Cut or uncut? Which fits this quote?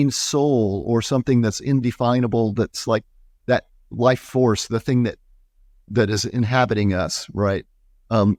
uncut